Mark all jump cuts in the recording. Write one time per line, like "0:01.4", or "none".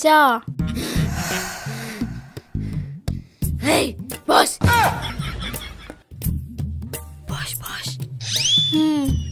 none